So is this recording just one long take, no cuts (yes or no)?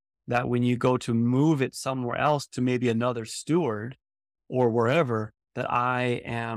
yes